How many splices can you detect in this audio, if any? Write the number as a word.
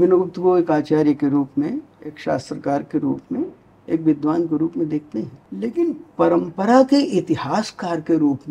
two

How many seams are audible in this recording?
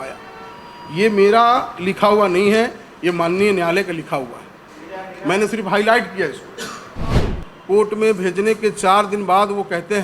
one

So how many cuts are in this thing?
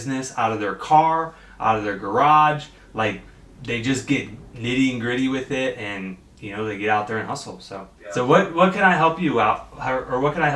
one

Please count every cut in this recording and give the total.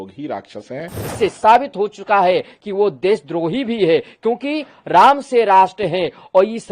one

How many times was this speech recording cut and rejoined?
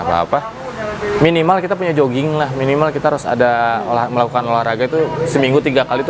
zero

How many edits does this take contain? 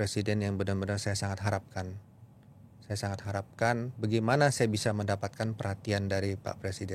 zero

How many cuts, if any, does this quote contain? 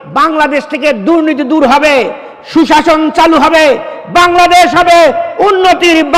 zero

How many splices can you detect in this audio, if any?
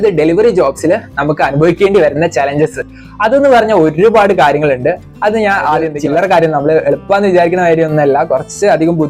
zero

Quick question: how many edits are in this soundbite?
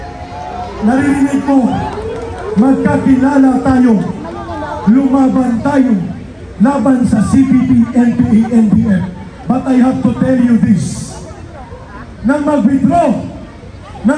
zero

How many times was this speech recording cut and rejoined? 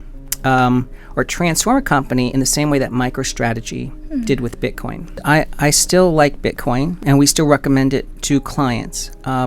one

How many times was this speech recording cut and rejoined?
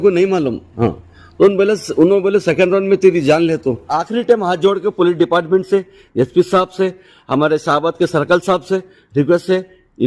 one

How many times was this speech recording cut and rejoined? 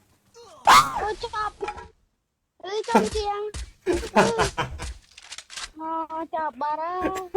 one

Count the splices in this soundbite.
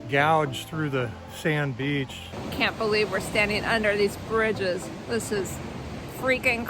one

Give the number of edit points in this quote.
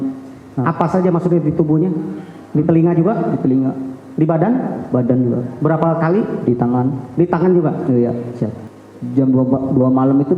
one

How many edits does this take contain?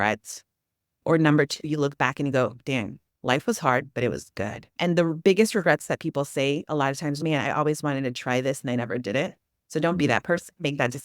one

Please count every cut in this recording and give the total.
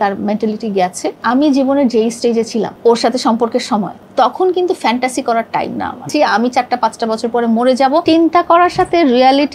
five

